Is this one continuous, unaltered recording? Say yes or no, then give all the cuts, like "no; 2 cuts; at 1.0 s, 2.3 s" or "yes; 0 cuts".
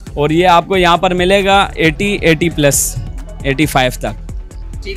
yes; 0 cuts